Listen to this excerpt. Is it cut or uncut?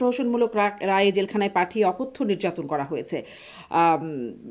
uncut